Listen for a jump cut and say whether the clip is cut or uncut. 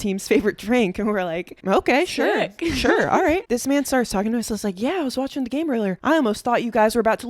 uncut